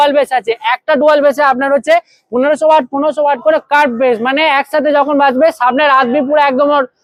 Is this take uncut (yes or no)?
yes